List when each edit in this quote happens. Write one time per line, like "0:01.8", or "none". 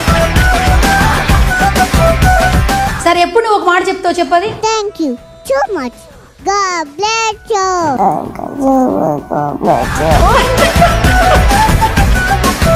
0:02.9